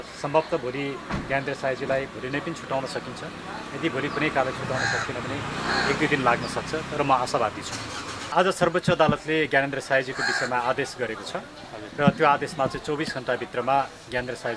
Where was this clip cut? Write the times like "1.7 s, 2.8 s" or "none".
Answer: 8.3 s